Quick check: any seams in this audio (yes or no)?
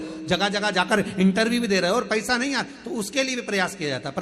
no